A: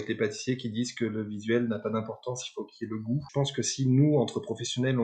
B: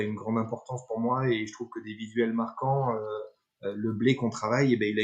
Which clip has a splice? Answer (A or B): A